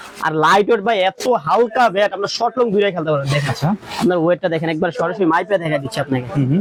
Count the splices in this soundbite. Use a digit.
0